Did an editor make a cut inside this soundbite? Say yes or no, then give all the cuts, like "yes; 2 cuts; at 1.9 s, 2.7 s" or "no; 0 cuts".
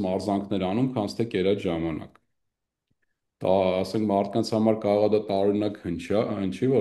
no; 0 cuts